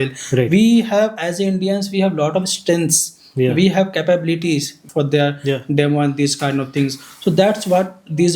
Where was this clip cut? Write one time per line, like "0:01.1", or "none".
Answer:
0:04.8